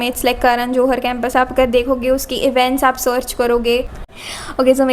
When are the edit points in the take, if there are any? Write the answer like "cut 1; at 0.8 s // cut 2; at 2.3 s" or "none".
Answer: cut 1; at 4.0 s